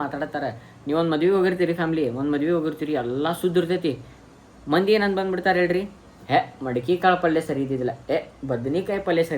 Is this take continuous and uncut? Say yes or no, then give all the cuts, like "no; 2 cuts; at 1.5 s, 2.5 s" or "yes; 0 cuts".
yes; 0 cuts